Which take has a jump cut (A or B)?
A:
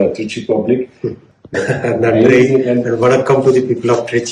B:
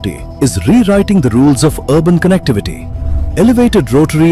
A